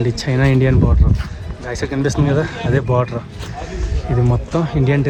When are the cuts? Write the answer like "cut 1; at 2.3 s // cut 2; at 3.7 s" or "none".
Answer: none